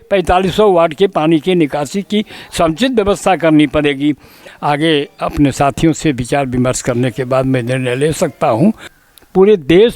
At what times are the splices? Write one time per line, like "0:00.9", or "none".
0:04.3
0:08.9